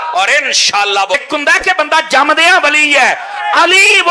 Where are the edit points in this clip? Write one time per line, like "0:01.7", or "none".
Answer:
0:01.1